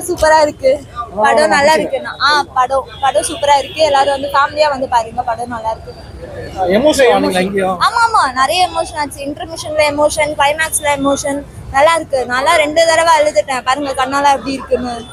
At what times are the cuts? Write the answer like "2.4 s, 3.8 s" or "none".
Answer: none